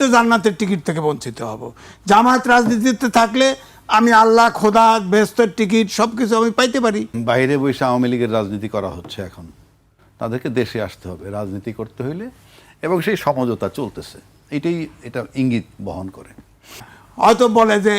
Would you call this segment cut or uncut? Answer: cut